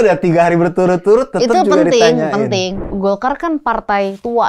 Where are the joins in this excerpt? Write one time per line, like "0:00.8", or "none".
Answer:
0:02.7